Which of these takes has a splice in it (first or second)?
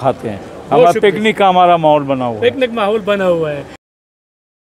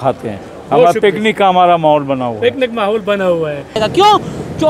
second